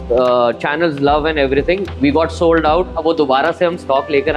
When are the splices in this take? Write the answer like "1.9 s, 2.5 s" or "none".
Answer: none